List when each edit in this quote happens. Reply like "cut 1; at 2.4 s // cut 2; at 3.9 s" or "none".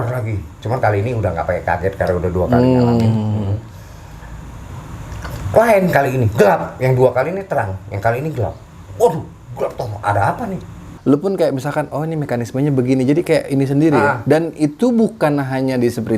cut 1; at 10.9 s